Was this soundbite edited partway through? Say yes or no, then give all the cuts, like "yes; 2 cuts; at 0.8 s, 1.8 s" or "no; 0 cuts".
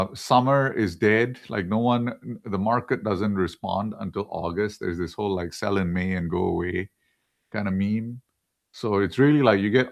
no; 0 cuts